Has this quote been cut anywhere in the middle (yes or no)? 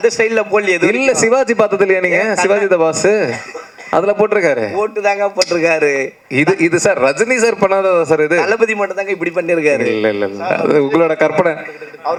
no